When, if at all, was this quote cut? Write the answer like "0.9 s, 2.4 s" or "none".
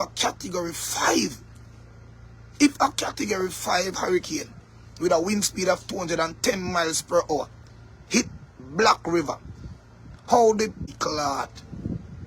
10.9 s